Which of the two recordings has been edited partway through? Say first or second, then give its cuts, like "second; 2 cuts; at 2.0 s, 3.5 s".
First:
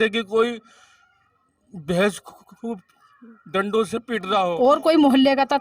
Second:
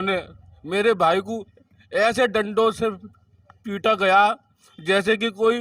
first; 1 cut; at 4.5 s